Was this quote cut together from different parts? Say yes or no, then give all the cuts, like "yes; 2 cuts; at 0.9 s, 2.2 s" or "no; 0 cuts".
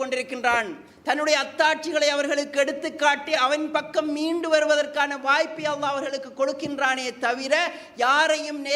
yes; 1 cut; at 3.4 s